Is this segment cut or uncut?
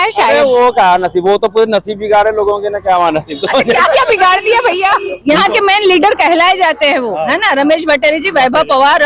cut